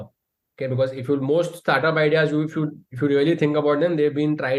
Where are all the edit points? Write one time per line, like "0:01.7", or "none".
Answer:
none